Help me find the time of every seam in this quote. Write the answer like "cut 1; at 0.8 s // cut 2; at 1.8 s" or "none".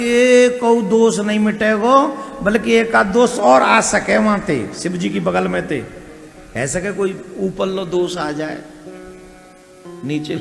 none

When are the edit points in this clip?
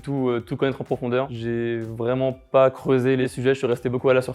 cut 1; at 1.4 s // cut 2; at 3.3 s

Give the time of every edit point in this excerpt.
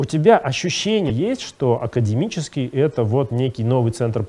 cut 1; at 1.1 s

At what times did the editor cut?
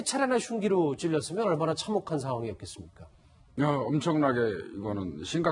cut 1; at 2.5 s

